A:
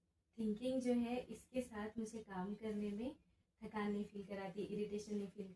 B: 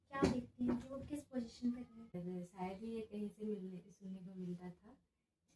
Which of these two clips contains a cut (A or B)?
B